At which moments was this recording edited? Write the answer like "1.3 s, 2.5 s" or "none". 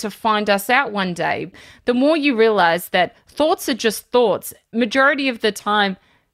1.5 s, 4.7 s